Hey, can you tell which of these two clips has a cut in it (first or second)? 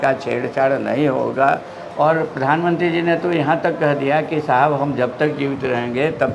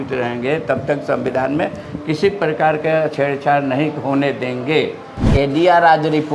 second